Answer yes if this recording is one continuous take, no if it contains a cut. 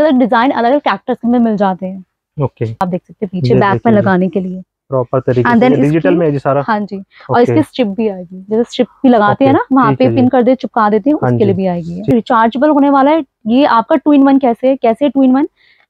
no